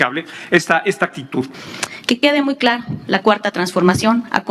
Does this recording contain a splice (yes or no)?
yes